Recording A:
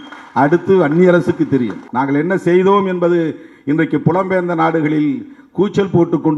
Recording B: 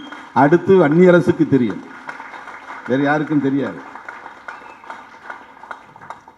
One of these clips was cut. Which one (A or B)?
A